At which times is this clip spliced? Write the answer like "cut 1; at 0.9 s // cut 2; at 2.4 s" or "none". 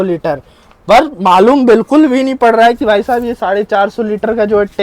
none